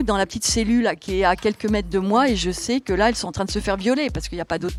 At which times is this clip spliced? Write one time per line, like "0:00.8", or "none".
none